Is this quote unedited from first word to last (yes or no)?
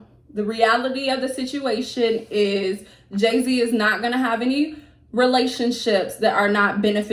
yes